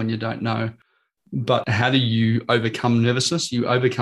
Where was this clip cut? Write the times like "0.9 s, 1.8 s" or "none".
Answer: 1.6 s